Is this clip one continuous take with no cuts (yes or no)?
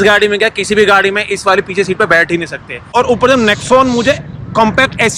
no